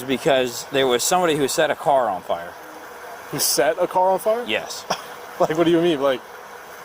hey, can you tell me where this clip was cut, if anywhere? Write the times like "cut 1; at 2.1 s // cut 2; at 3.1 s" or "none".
none